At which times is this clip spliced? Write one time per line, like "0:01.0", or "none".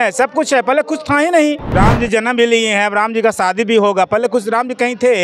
0:01.7